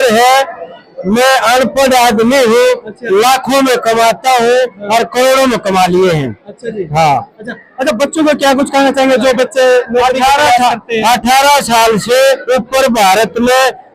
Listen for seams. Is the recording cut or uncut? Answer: uncut